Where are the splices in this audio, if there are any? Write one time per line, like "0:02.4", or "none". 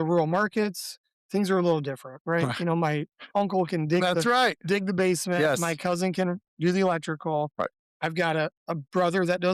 none